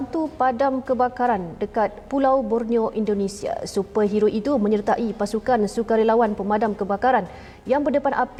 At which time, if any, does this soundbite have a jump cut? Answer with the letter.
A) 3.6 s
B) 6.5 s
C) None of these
C